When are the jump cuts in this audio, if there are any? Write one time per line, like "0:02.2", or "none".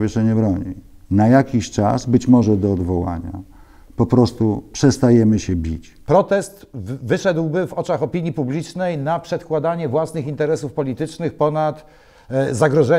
0:05.9